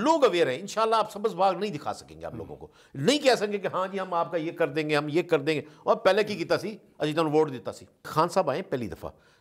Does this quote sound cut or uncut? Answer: cut